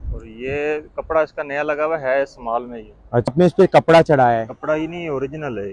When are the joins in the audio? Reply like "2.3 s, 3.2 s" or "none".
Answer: 3.3 s